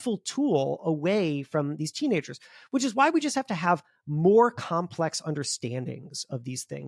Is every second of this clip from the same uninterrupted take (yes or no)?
yes